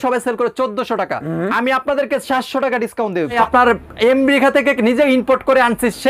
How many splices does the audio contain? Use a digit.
1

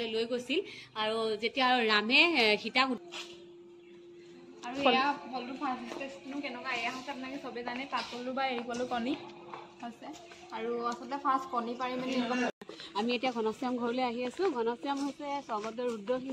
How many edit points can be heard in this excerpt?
2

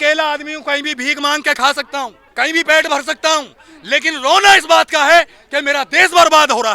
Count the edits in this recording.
1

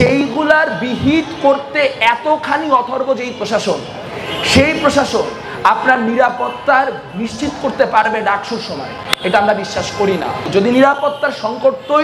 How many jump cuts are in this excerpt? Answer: 1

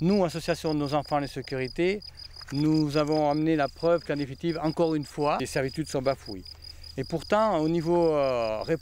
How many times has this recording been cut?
1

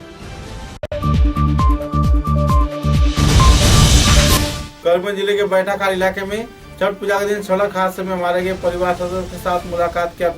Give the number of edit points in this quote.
2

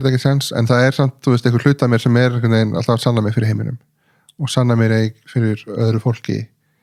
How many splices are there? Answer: 0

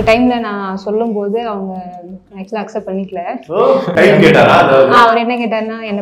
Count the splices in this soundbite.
2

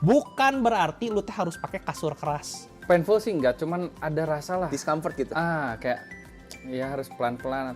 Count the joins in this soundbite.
1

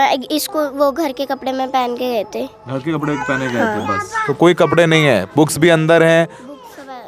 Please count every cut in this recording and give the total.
0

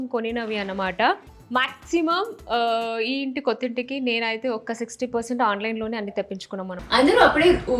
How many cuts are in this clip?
2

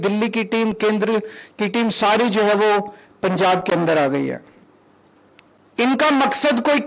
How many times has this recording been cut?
0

